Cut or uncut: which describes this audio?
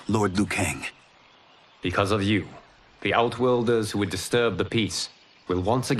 uncut